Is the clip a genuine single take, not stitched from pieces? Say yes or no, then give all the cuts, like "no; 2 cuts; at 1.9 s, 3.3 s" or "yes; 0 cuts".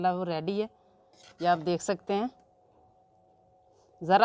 yes; 0 cuts